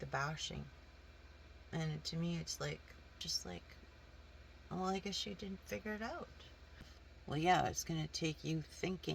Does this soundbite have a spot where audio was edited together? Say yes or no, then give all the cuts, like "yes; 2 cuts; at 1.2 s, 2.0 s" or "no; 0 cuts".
yes; 2 cuts; at 3.2 s, 7.0 s